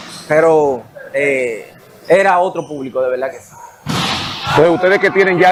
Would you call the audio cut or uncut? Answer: uncut